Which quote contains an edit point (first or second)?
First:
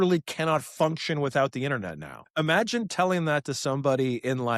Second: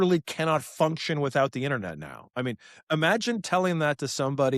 first